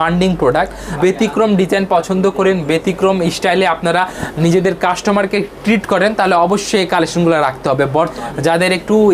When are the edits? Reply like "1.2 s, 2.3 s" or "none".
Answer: 1.0 s, 8.1 s